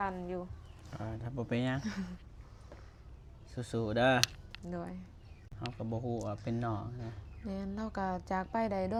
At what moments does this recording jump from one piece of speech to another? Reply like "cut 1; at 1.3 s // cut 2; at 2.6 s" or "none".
none